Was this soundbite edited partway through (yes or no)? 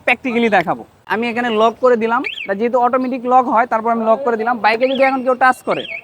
yes